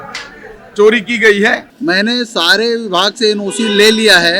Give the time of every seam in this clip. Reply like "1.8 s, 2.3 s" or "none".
1.7 s